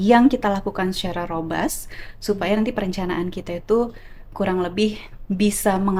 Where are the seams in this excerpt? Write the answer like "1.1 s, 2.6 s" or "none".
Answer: none